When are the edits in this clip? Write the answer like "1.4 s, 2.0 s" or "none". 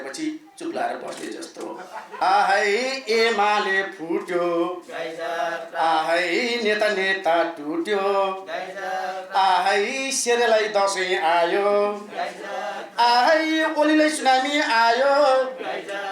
2.1 s